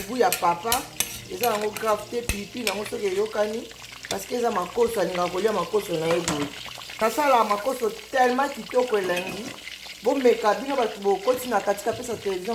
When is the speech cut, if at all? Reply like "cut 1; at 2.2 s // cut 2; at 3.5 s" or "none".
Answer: cut 1; at 6.9 s